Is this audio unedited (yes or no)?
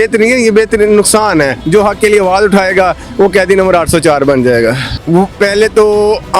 no